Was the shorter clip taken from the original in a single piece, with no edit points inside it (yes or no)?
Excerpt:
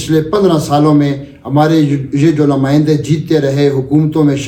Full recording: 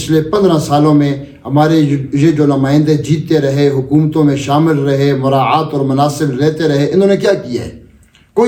yes